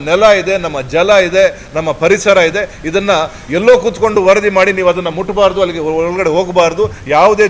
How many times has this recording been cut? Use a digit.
0